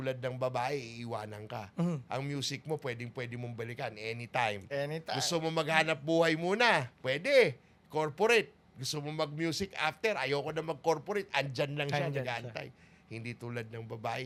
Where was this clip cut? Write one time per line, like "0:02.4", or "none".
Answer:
none